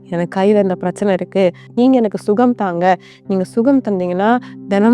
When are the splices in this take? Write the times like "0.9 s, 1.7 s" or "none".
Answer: 1.7 s